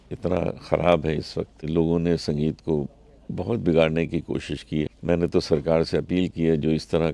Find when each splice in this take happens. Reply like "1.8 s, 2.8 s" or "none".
1.7 s, 4.9 s